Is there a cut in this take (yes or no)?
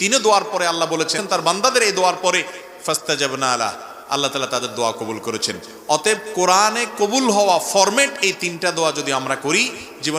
yes